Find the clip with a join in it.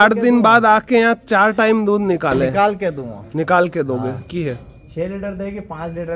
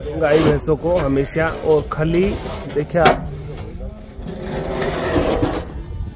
first; 1 cut; at 4.2 s

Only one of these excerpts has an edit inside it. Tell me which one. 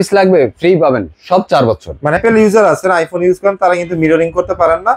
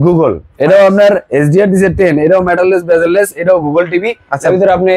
first; 1 cut; at 2.2 s

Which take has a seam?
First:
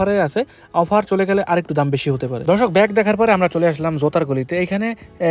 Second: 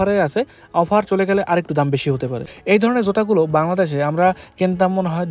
second; 1 cut; at 2.3 s

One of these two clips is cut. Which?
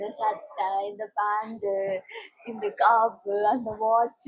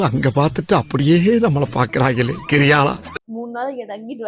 second; 1 cut; at 3.2 s

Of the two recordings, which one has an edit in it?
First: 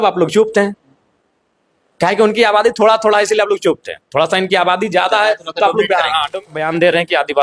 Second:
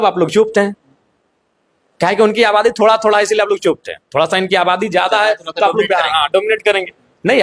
first; 1 cut; at 6.5 s

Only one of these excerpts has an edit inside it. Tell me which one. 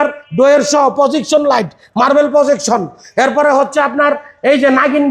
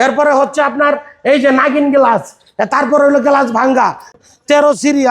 second; 1 cut; at 4.1 s

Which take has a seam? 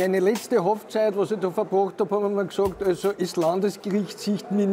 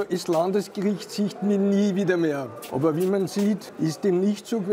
second; 2 cuts; at 2.6 s, 3.7 s

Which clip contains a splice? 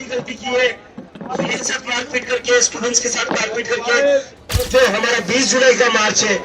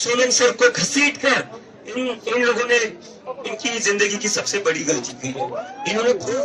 first; 1 cut; at 4.4 s

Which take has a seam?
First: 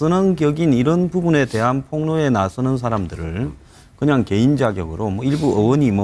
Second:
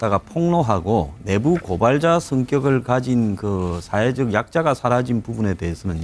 first; 1 cut; at 4.3 s

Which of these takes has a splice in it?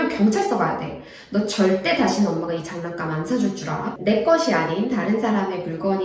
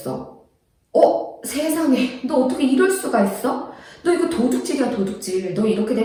first; 1 cut; at 4.0 s

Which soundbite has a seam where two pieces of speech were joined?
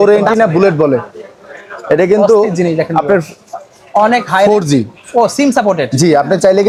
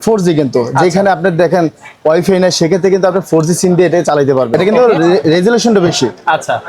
second; 1 cut; at 4.5 s

